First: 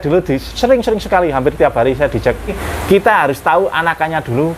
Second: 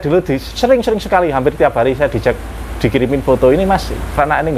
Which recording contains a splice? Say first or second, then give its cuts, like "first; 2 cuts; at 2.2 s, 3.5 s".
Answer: first; 1 cut; at 2.7 s